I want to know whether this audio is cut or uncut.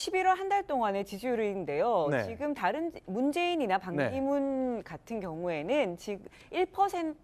uncut